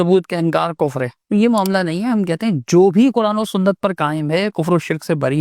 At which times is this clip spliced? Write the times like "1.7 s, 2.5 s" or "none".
1.2 s